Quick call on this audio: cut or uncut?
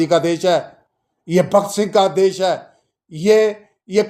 uncut